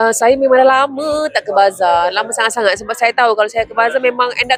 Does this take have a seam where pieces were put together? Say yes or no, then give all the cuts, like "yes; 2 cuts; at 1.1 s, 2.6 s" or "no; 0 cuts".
no; 0 cuts